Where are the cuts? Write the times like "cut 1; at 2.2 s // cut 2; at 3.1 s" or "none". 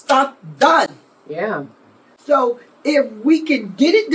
none